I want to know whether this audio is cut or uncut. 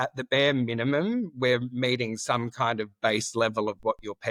uncut